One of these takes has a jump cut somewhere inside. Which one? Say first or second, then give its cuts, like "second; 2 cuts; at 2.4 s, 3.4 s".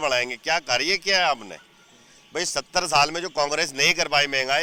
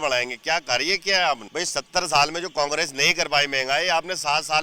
second; 1 cut; at 1.5 s